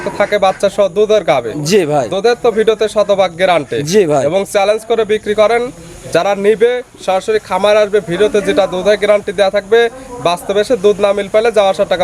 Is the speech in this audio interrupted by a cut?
no; 0 cuts

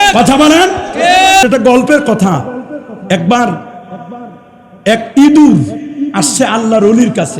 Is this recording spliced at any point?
yes; 1 cut; at 1.4 s

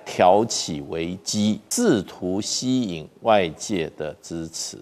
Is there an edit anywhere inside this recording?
yes; 1 cut; at 1.7 s

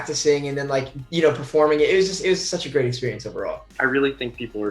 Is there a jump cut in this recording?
yes; 1 cut; at 3.7 s

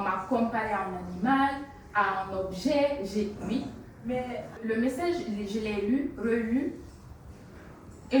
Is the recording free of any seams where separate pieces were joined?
no; 1 cut; at 4.6 s

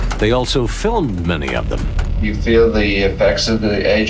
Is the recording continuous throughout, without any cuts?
no; 1 cut; at 2.0 s

